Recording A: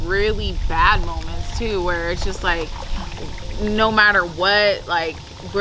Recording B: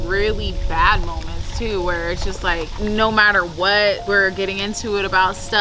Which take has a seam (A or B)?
B